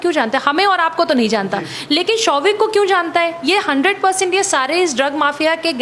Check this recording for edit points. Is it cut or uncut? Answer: uncut